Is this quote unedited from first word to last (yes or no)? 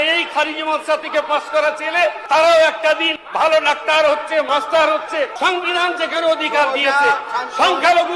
no